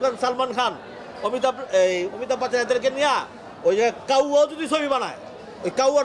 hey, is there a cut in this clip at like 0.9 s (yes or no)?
no